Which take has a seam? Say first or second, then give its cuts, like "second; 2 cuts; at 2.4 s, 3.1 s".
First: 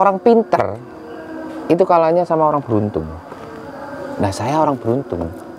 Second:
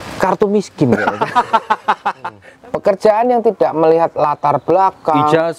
second; 1 cut; at 2.4 s